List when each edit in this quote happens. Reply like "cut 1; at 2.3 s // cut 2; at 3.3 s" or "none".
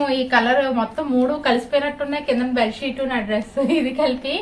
none